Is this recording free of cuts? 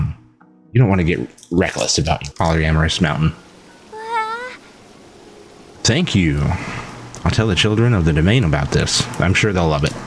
no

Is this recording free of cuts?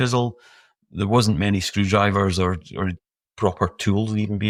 yes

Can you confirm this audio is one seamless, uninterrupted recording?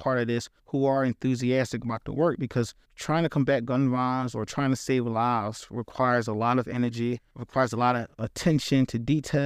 yes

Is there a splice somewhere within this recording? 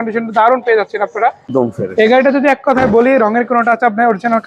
yes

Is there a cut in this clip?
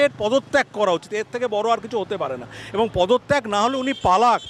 no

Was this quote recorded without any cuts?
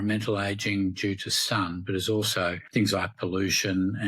no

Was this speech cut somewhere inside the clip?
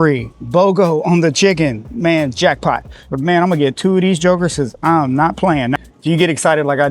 yes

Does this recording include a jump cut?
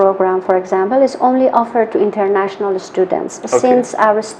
no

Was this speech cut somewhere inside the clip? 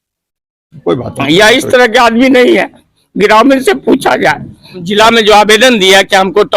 yes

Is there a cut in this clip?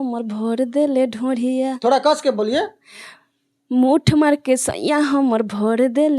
no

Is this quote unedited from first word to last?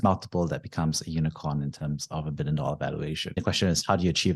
no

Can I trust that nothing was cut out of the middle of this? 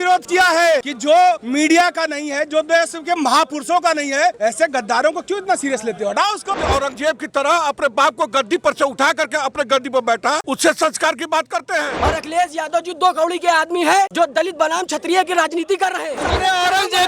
no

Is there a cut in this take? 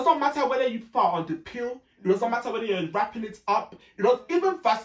no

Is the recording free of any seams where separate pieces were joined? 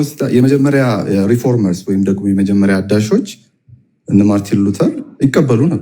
yes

